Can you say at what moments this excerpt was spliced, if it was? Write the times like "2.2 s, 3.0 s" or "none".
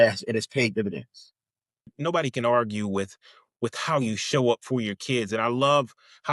1.9 s